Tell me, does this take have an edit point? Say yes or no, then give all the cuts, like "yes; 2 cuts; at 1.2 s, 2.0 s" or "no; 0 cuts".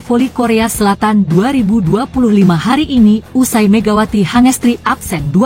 no; 0 cuts